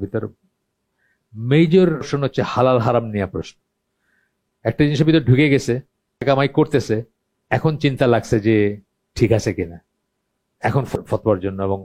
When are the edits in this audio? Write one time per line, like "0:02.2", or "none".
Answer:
0:02.1
0:06.2
0:10.9